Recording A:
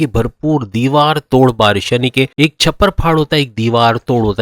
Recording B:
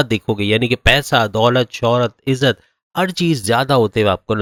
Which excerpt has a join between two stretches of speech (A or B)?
A